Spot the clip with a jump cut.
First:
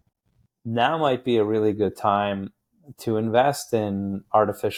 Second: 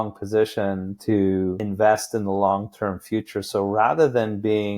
second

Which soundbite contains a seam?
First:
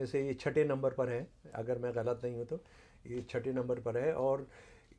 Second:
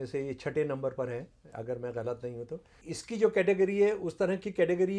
second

